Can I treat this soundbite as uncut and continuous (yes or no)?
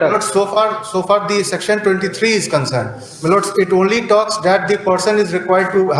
yes